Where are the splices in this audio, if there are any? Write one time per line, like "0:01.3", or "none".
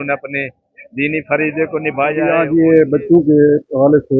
0:02.2